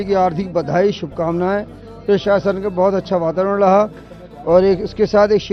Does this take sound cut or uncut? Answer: uncut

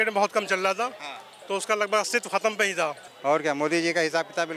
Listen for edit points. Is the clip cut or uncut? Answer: cut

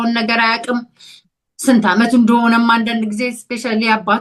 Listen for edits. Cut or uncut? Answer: uncut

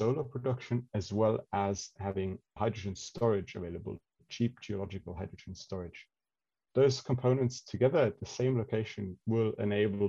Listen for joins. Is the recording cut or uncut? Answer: uncut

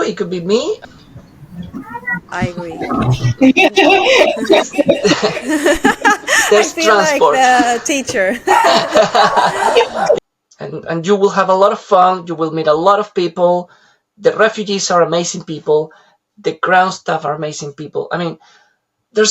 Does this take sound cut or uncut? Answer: cut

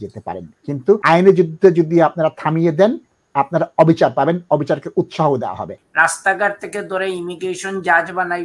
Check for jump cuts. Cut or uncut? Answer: cut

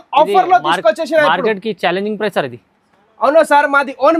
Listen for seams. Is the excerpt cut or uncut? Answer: uncut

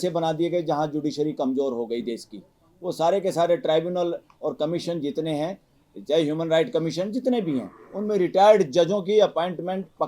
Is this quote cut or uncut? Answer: uncut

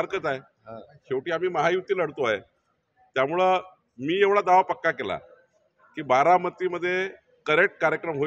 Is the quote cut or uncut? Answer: uncut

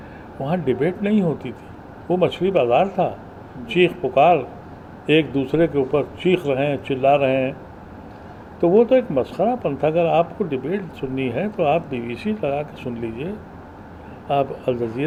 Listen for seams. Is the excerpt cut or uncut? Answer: uncut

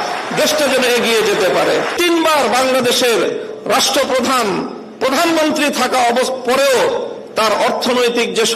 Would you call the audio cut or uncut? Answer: cut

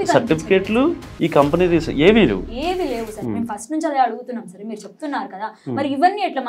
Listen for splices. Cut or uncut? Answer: uncut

